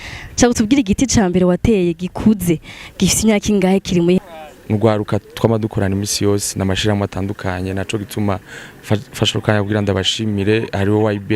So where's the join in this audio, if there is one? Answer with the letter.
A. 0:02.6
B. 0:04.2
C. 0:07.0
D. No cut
B